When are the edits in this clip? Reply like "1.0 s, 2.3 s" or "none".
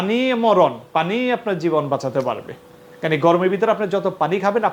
none

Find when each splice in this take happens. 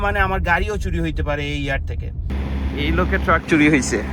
2.3 s

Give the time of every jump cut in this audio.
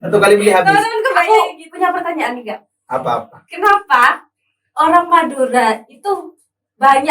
1.2 s

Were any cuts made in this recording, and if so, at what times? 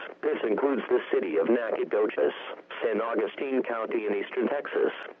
1.2 s

